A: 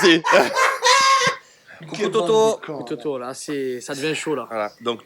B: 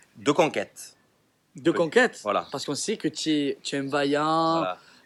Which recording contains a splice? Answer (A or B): A